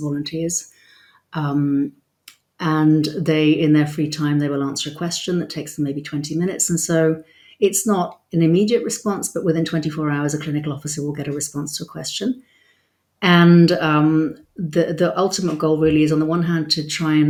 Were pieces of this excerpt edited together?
no; 0 cuts

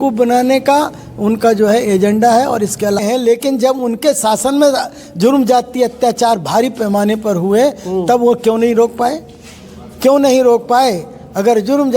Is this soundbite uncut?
no; 1 cut; at 3.0 s

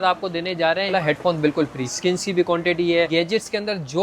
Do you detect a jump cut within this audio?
yes; 3 cuts; at 0.9 s, 1.9 s, 3.1 s

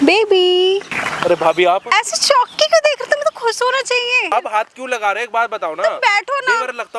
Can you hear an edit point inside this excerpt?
yes; 3 cuts; at 1.0 s, 1.9 s, 4.3 s

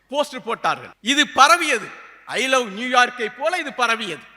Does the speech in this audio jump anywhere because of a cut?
yes; 1 cut; at 0.9 s

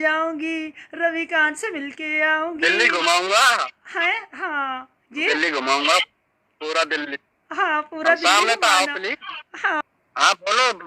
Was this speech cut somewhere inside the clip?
yes; 1 cut; at 9.8 s

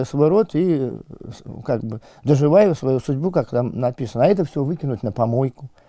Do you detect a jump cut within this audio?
no; 0 cuts

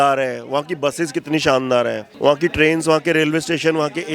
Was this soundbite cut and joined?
yes; 1 cut; at 2.0 s

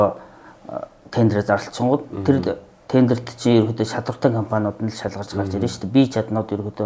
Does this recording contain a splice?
no; 0 cuts

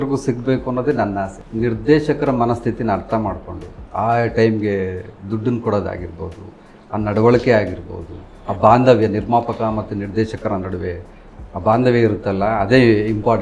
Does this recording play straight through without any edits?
no; 1 cut; at 1.4 s

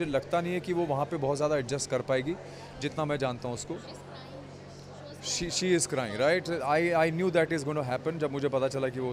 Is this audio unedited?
yes; 0 cuts

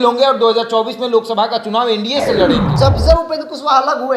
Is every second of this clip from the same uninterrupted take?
no; 1 cut; at 2.7 s

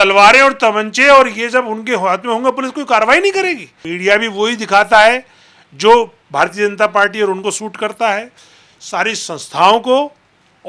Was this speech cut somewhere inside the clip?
yes; 1 cut; at 3.8 s

